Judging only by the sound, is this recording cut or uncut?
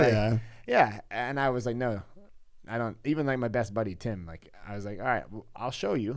uncut